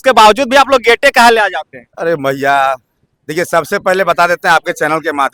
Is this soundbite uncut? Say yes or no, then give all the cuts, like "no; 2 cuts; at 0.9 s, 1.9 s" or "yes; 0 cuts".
yes; 0 cuts